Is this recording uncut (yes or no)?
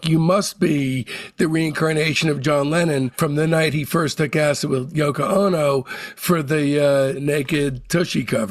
yes